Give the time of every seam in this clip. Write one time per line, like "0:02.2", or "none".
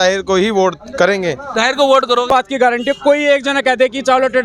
0:02.3